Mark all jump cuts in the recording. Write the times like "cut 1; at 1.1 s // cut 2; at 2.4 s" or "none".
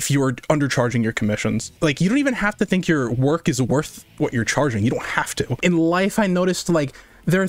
cut 1; at 1.7 s // cut 2; at 5.6 s